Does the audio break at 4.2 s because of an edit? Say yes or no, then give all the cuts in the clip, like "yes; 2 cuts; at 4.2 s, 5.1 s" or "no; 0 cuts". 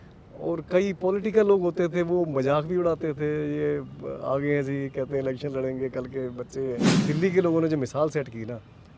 no; 1 cut; at 6.9 s